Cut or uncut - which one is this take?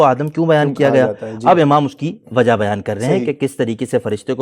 uncut